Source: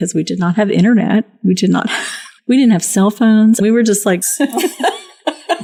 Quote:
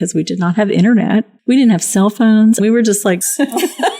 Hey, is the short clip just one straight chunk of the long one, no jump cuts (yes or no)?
no